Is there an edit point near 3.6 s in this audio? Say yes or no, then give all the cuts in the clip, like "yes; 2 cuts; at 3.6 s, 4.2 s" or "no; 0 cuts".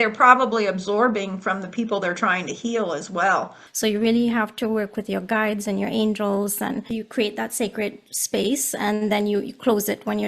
yes; 2 cuts; at 3.6 s, 6.9 s